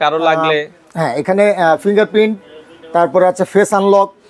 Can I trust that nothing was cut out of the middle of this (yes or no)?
yes